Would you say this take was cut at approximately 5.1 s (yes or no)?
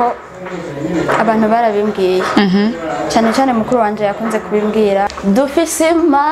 yes